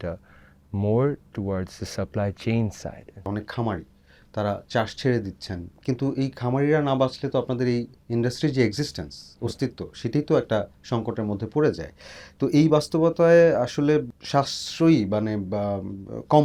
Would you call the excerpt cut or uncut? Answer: uncut